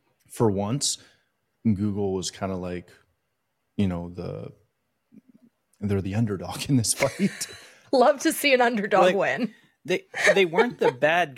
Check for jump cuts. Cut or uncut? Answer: uncut